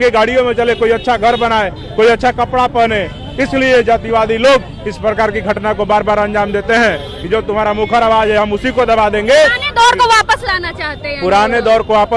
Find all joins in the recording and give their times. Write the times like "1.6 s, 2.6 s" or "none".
none

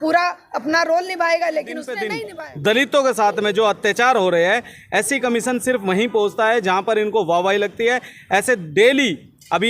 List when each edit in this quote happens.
2.1 s

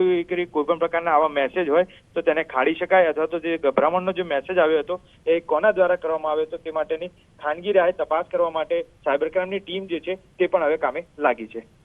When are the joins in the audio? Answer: none

